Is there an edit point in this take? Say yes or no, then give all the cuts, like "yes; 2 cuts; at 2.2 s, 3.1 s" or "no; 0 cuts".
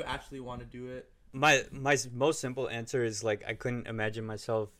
yes; 1 cut; at 1.3 s